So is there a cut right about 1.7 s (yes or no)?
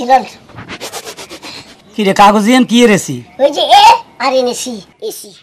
no